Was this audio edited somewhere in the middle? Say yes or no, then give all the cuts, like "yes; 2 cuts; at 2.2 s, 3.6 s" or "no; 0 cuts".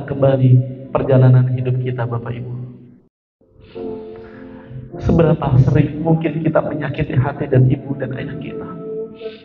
yes; 1 cut; at 3.7 s